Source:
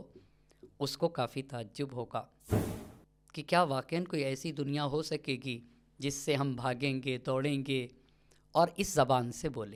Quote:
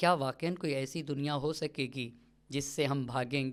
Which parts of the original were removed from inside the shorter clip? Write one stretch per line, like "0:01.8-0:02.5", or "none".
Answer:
none